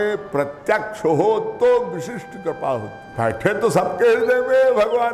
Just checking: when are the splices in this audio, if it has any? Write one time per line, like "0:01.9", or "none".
0:03.0